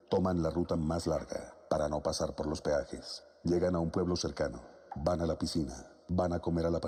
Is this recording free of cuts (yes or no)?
yes